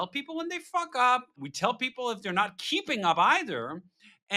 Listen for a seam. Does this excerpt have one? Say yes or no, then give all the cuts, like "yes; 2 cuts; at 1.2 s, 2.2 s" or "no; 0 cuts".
yes; 1 cut; at 1.5 s